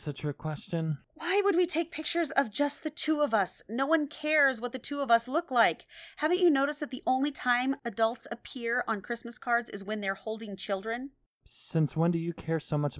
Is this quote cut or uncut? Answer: cut